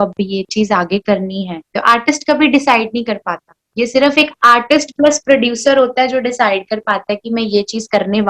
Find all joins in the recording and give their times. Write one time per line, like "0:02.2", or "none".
0:01.7

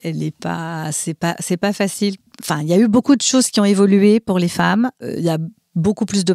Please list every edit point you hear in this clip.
0:02.3
0:05.0

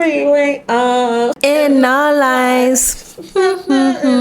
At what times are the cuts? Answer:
0:01.4

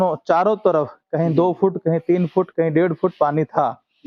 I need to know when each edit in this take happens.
none

